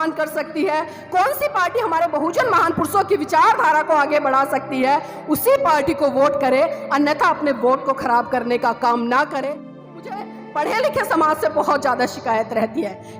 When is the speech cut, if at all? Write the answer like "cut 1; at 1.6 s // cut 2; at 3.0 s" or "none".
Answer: cut 1; at 9.8 s